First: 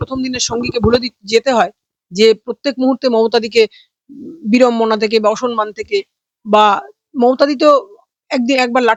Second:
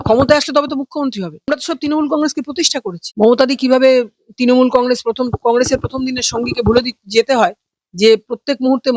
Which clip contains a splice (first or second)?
second